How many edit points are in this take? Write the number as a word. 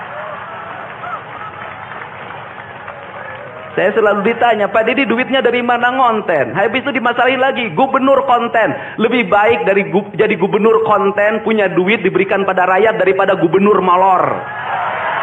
zero